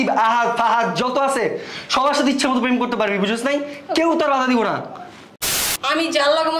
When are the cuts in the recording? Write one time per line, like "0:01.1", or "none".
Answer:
0:05.5